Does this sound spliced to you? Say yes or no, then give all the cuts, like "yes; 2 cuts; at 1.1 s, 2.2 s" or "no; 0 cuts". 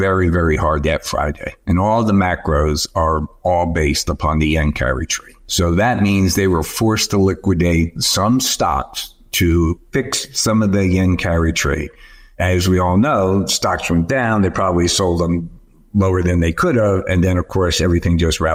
no; 0 cuts